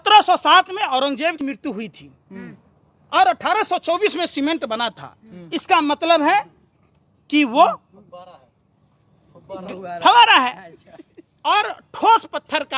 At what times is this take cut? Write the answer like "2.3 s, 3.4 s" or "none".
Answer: 1.4 s